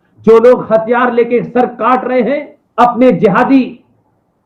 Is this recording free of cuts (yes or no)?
no